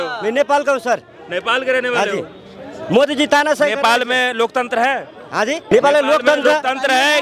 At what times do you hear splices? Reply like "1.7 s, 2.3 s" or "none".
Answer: 5.7 s